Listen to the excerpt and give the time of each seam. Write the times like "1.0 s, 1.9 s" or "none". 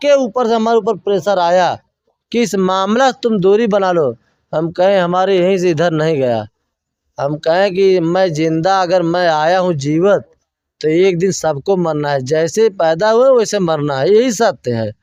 none